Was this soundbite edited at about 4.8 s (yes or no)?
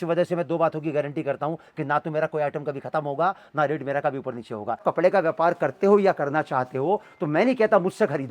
yes